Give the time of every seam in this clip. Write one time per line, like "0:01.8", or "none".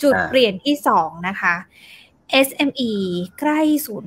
none